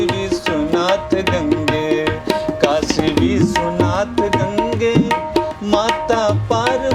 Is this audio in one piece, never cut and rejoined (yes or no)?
yes